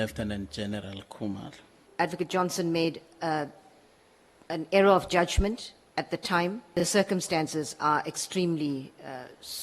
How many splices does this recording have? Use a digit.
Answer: 2